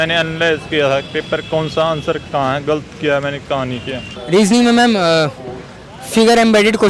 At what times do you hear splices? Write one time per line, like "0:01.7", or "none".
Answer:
0:04.1